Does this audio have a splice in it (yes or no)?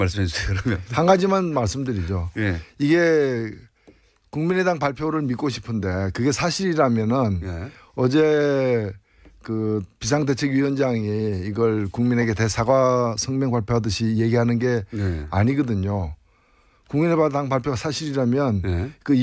no